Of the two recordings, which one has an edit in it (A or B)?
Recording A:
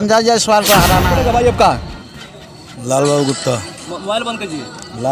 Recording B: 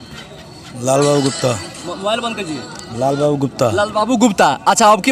A